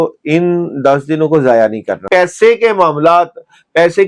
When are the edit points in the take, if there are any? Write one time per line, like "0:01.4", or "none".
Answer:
0:02.0

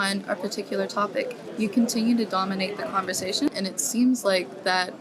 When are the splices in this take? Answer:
0:03.5

